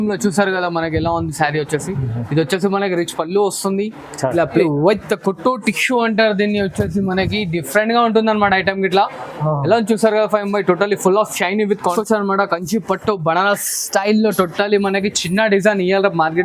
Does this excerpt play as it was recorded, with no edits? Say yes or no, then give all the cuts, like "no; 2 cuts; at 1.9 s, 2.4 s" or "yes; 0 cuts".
no; 2 cuts; at 4.6 s, 11.9 s